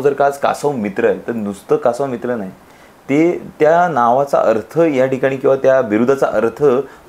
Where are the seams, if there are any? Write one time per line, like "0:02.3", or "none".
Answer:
none